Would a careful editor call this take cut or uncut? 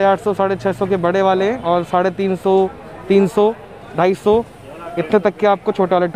uncut